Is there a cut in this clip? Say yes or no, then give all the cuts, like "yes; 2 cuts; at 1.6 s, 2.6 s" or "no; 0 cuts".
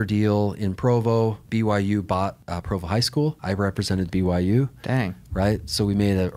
yes; 3 cuts; at 1.4 s, 2.5 s, 3.4 s